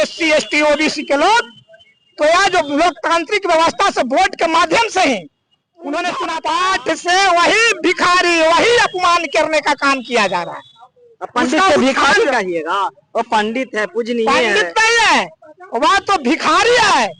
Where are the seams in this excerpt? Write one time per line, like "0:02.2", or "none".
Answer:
0:06.3